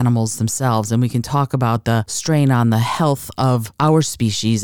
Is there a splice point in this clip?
yes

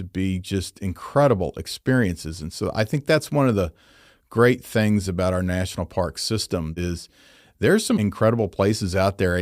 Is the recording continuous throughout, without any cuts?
no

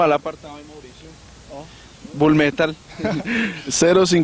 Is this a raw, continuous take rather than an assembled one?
no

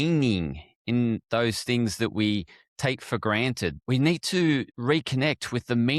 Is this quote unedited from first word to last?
no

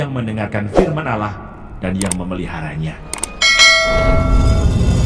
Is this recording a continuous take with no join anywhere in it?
yes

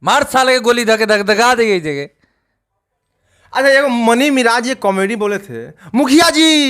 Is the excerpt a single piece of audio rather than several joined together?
yes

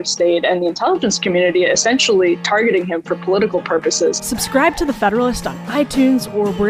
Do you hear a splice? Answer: yes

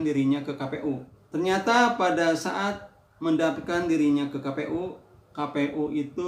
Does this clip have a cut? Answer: yes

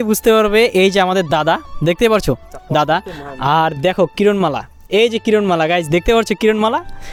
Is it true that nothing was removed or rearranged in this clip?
yes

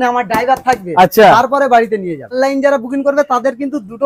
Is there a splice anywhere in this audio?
yes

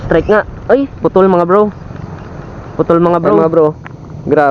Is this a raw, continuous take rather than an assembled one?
no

